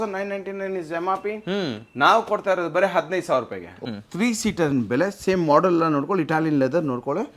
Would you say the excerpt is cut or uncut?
cut